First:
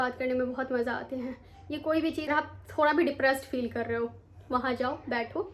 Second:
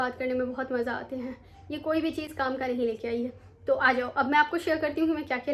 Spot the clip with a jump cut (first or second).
first